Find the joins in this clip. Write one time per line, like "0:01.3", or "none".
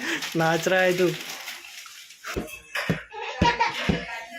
0:02.2